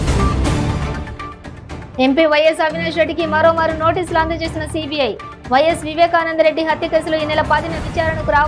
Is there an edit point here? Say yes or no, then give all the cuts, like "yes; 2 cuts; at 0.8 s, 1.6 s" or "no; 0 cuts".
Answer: no; 0 cuts